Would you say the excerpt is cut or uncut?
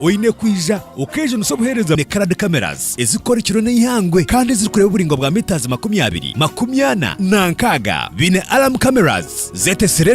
cut